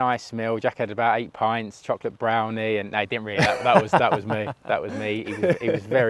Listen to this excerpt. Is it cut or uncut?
uncut